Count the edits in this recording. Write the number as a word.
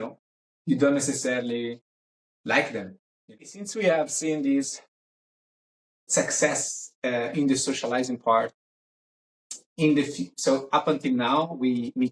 one